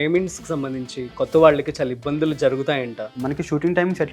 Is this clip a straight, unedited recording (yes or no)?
no